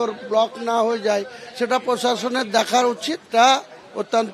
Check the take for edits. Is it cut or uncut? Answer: cut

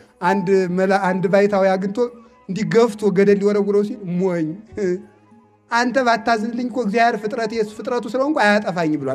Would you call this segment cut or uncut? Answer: uncut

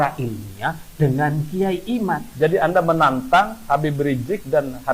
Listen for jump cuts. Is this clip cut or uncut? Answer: cut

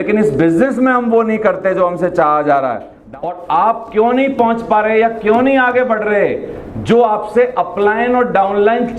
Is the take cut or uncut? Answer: cut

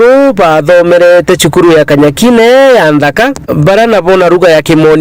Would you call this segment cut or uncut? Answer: cut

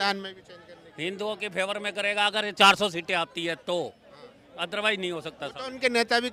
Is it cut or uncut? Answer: uncut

